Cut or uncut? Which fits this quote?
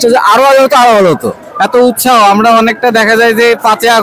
uncut